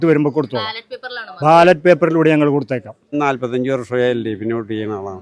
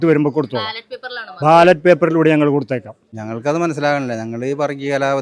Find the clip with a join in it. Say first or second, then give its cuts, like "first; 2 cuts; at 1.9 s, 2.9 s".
first; 1 cut; at 3.0 s